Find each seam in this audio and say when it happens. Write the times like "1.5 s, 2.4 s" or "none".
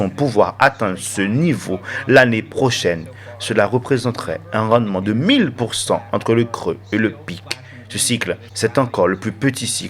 8.5 s